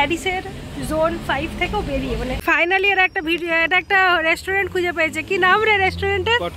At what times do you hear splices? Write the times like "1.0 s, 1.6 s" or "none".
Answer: 2.4 s